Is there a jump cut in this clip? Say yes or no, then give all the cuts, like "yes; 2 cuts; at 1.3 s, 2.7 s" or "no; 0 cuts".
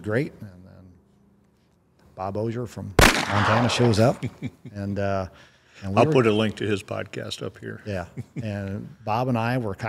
no; 0 cuts